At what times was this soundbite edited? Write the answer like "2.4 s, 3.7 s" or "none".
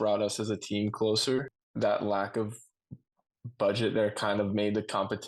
1.5 s